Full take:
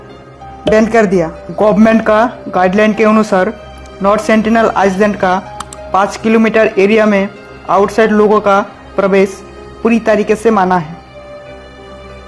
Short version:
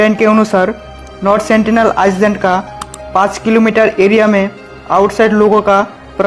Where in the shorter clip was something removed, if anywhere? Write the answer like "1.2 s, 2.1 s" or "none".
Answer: none